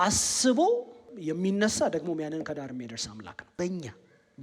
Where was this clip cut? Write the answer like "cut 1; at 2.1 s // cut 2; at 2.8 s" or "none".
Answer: cut 1; at 1.1 s // cut 2; at 3.4 s